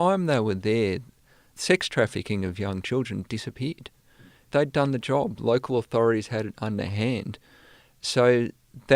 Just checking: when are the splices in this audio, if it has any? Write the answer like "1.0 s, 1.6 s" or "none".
1.5 s, 4.5 s